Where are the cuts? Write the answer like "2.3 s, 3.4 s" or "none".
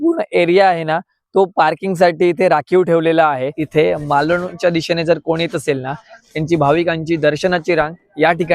3.6 s

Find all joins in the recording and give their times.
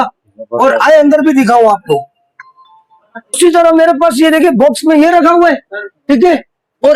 none

